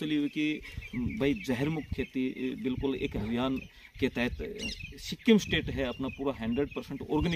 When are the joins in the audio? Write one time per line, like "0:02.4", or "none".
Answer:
none